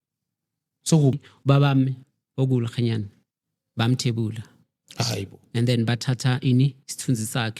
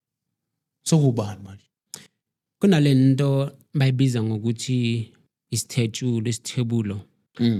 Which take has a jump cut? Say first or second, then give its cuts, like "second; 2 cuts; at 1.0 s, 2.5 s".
first; 1 cut; at 1.2 s